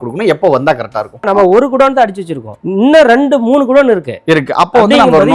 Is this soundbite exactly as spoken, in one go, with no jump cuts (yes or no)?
no